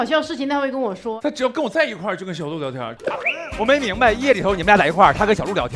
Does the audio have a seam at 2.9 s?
yes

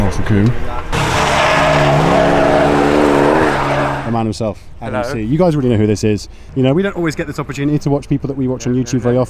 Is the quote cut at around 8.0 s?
no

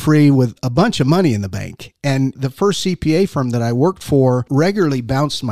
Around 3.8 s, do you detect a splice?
no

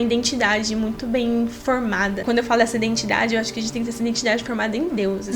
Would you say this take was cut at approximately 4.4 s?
no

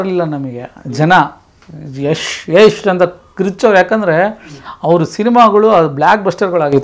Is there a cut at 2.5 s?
no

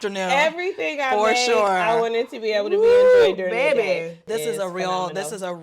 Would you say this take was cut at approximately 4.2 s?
yes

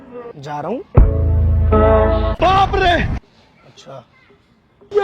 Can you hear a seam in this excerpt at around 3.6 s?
no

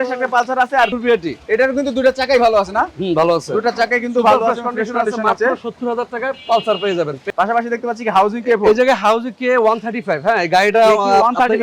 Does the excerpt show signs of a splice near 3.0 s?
no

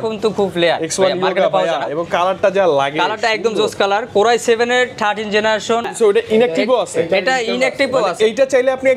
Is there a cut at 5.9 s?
yes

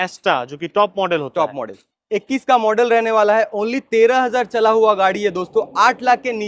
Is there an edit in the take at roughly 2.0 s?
yes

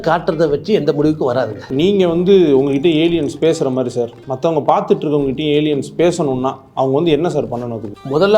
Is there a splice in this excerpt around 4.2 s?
no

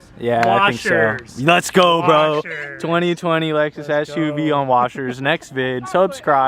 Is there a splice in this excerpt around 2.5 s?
no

